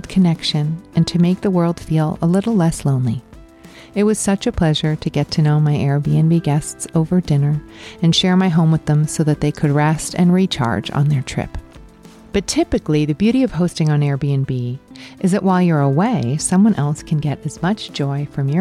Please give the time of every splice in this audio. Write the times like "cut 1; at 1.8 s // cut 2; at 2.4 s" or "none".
none